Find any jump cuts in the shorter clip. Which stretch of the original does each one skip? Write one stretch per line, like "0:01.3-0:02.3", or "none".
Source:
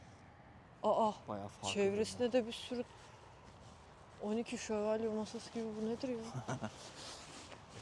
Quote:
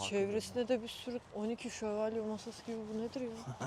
0:02.9-0:04.2